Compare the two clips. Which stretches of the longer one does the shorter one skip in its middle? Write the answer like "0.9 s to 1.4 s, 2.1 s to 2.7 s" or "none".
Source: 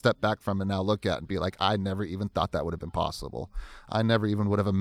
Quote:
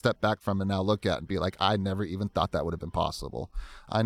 none

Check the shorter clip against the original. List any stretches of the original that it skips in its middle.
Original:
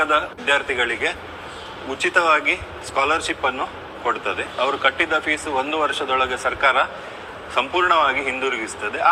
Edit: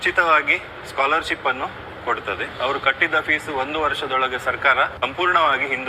6.9 s to 7.5 s

